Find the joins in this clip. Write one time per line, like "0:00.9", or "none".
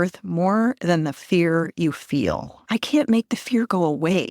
0:02.5